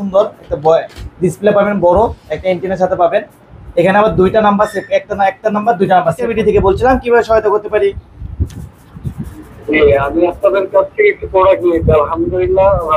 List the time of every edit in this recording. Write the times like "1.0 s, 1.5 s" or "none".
6.2 s